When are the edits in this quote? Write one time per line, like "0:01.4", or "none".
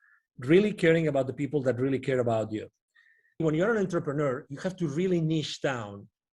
0:03.4